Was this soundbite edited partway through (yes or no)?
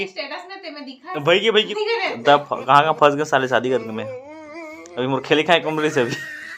yes